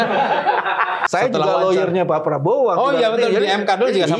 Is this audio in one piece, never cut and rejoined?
no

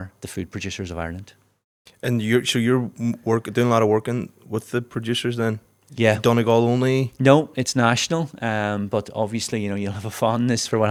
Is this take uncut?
yes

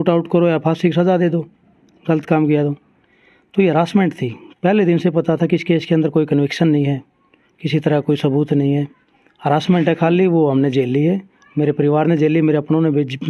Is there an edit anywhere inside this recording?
no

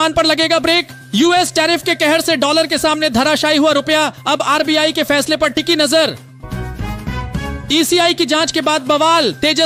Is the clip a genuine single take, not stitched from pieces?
yes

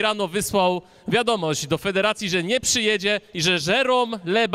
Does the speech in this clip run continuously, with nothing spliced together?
yes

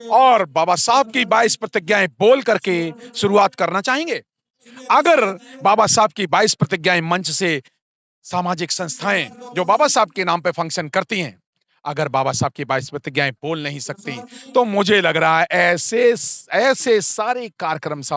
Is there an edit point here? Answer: no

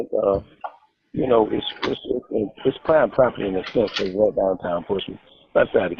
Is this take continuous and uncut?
no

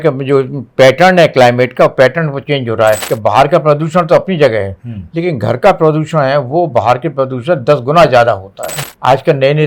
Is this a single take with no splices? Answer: no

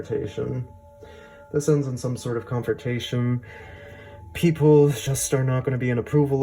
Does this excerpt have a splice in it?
no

